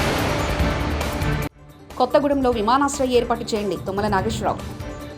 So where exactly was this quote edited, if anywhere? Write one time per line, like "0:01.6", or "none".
0:01.3